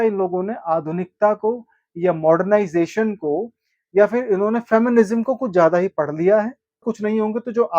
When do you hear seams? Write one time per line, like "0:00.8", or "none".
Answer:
0:06.9